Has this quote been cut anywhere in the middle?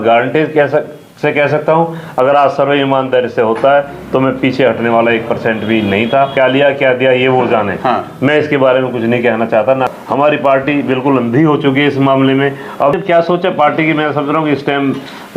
yes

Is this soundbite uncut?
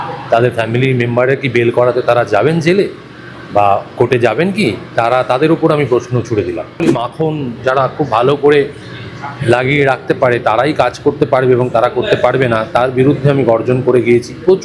no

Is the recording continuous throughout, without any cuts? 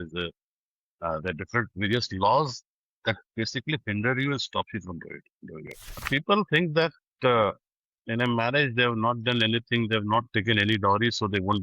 no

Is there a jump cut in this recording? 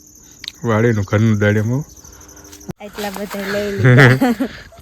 yes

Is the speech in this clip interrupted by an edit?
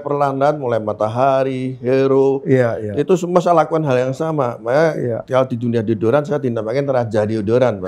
no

